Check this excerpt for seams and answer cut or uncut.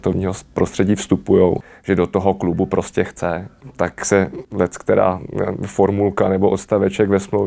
cut